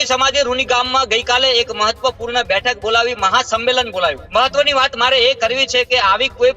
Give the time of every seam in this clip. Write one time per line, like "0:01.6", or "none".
0:04.2